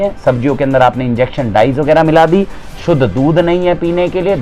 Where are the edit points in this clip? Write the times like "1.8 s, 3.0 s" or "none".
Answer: none